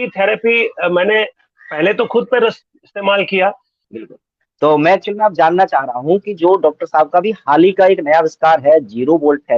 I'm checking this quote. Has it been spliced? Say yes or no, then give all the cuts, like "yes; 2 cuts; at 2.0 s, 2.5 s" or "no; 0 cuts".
yes; 1 cut; at 3.9 s